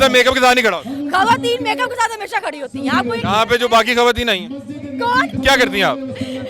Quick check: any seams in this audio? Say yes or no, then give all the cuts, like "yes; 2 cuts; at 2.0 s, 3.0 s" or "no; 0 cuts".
yes; 1 cut; at 5.3 s